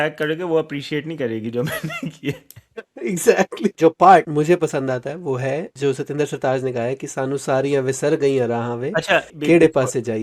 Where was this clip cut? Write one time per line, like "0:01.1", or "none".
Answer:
0:03.7
0:04.3
0:05.7
0:09.3